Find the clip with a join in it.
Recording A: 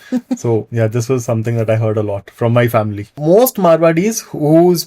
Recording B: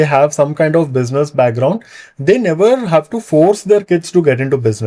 A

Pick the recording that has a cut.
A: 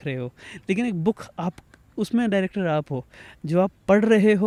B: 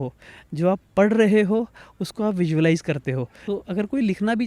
B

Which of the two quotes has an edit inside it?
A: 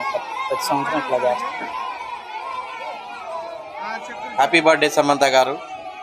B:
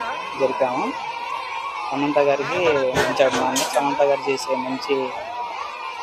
A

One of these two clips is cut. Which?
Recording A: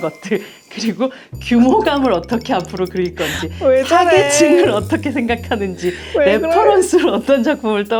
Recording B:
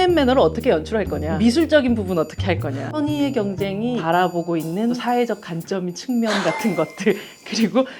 B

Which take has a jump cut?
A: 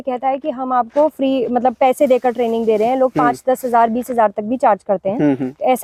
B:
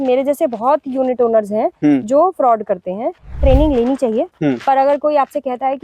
B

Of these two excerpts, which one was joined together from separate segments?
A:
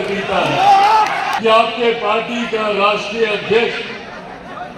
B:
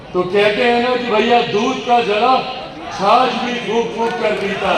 A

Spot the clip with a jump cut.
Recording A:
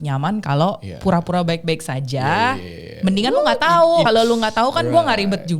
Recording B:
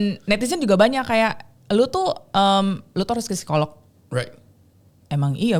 A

